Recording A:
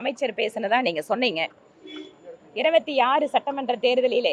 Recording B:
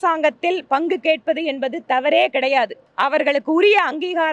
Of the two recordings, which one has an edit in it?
B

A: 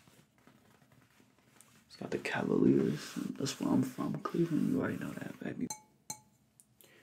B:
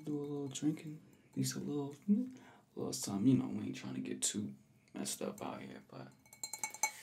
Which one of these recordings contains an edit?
A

